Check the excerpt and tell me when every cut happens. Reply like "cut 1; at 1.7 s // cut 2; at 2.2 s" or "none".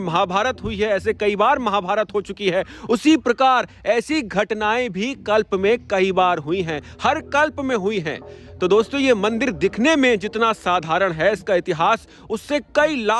none

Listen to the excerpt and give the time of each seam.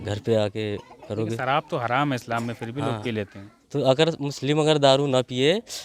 none

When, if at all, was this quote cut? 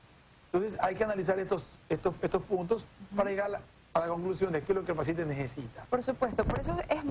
cut 1; at 1.1 s

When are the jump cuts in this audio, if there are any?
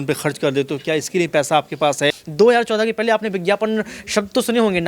cut 1; at 2.2 s

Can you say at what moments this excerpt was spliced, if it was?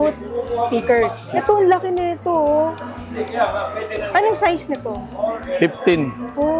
none

